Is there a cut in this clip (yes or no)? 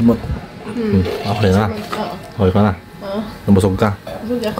no